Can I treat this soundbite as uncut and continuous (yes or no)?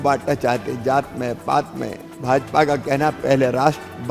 yes